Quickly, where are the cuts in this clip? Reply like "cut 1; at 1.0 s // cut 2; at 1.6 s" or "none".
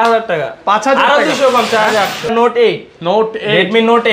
cut 1; at 2.3 s